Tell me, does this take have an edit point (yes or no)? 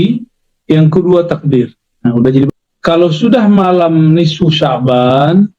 yes